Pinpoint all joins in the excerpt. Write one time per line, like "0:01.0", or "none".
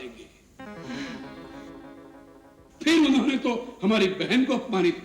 none